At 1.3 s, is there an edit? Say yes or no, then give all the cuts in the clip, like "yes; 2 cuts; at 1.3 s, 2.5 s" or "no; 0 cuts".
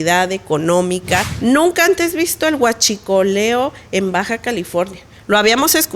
yes; 1 cut; at 1.3 s